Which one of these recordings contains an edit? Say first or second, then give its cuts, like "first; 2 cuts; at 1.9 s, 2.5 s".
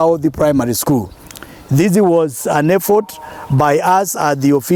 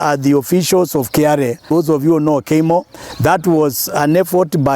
second; 1 cut; at 1.6 s